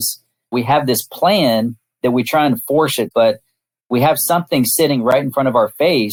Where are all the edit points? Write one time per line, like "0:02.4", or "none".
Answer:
none

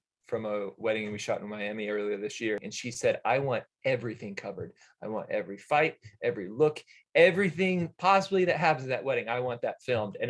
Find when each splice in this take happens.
0:02.7

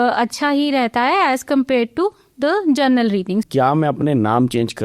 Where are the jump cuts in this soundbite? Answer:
0:03.5

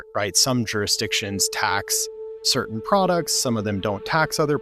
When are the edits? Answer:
none

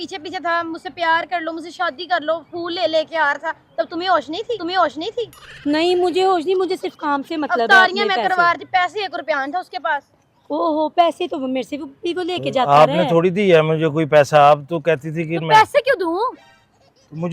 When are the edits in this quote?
none

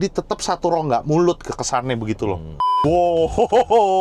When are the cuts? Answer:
0:02.7

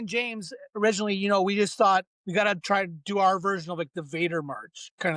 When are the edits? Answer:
0:02.2

